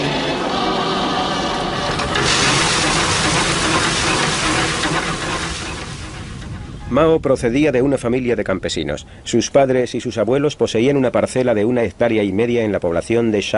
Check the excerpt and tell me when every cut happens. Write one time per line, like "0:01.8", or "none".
none